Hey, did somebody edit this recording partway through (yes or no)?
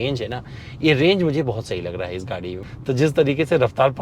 yes